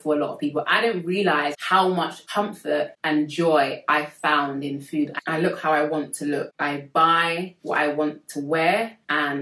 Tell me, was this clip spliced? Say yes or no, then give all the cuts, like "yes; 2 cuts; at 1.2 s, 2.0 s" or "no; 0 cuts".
yes; 4 cuts; at 1.9 s, 3.0 s, 5.2 s, 6.5 s